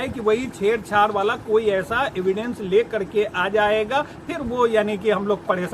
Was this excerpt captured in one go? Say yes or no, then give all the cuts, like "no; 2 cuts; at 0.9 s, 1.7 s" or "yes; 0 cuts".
yes; 0 cuts